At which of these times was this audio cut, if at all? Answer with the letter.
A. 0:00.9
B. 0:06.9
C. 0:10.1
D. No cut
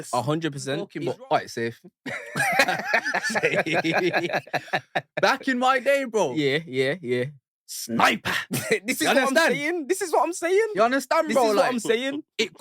A